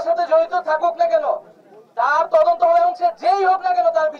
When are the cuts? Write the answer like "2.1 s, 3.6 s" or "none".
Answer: none